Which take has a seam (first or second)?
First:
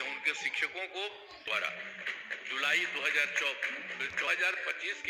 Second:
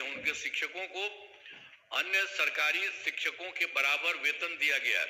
first